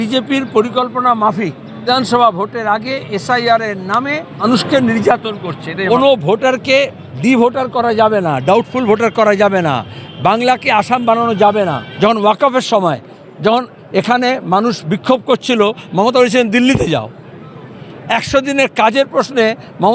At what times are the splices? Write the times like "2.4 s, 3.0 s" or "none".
1.9 s, 4.4 s, 5.7 s, 11.8 s